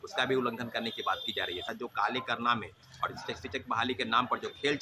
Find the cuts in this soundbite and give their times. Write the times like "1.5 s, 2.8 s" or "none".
1.7 s